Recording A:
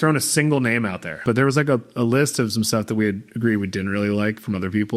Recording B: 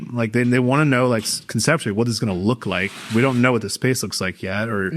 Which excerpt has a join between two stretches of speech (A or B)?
A